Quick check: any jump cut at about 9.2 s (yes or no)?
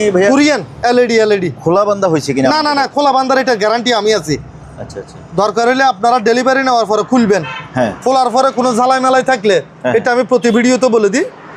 no